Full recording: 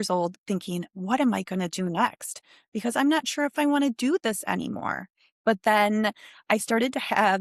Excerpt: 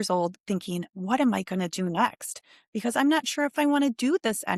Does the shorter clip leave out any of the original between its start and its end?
no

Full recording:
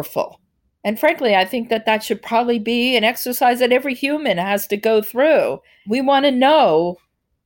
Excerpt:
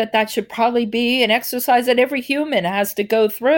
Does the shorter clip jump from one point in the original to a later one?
no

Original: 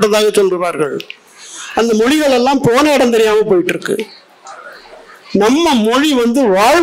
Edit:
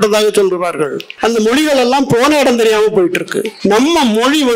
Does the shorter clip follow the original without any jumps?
no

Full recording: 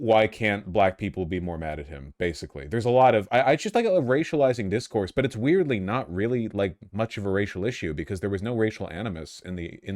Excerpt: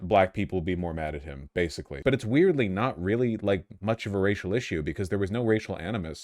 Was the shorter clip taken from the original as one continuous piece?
no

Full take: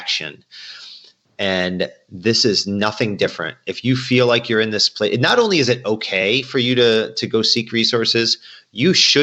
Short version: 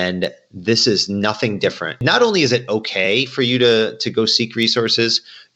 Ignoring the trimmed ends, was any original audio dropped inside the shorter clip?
yes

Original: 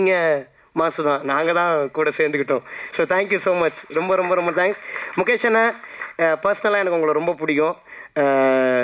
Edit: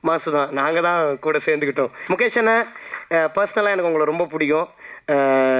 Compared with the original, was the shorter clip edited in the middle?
yes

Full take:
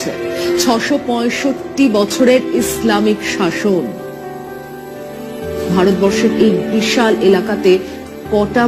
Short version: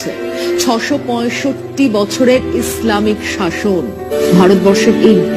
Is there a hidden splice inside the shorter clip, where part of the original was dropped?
yes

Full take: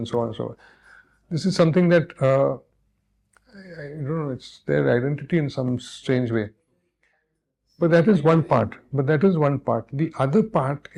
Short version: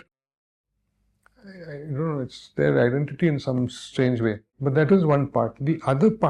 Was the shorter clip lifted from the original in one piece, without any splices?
no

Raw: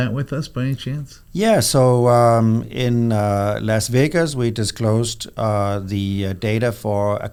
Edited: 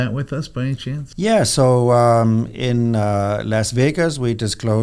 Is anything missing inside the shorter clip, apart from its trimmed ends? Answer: yes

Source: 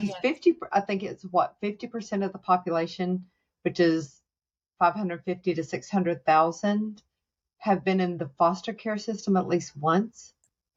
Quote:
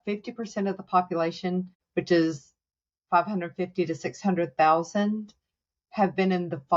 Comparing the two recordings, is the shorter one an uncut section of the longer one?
no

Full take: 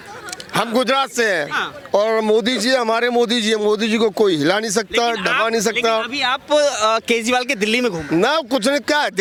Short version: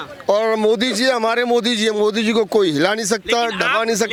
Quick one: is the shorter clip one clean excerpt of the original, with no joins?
yes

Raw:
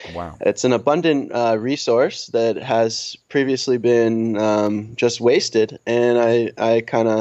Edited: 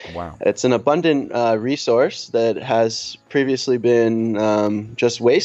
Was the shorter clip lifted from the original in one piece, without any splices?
yes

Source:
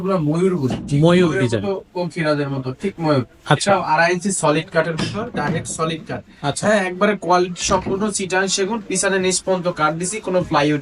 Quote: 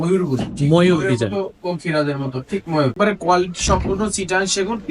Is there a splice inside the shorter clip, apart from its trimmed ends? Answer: yes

